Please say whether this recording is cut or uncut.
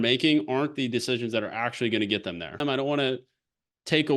cut